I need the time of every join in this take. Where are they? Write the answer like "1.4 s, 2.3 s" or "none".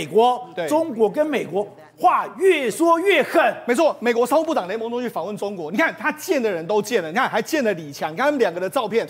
none